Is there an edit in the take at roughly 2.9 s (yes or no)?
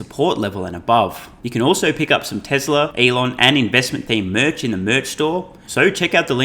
yes